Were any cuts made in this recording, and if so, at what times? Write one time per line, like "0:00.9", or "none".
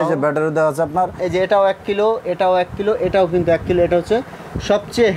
0:01.2